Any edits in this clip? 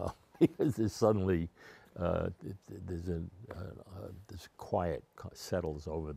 no; 0 cuts

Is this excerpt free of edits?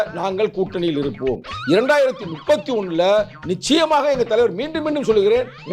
yes; 0 cuts

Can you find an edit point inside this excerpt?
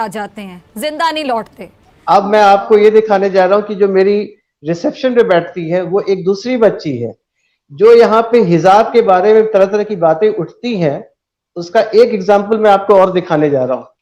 no; 0 cuts

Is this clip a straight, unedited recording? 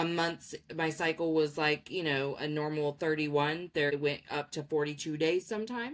no; 1 cut; at 3.9 s

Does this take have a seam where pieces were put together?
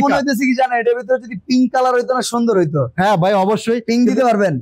no; 0 cuts

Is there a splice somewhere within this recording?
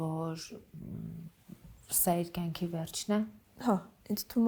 yes; 1 cut; at 3.4 s

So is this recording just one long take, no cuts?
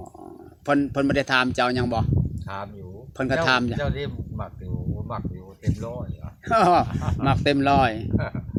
yes; 0 cuts

